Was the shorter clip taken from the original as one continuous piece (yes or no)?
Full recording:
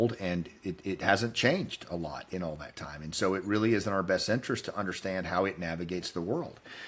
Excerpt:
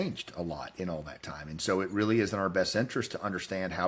yes